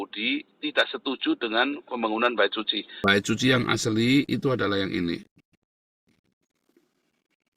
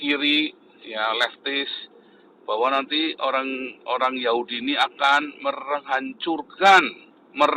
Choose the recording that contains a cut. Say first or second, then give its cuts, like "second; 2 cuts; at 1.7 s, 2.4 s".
first; 1 cut; at 2.8 s